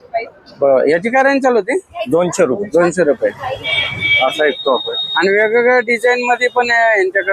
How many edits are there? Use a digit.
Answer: 1